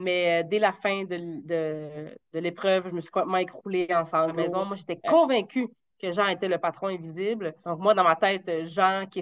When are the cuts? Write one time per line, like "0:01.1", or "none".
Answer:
0:04.4